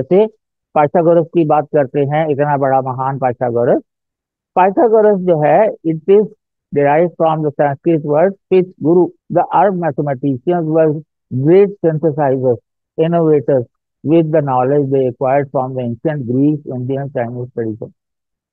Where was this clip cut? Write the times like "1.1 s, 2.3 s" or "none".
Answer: 9.2 s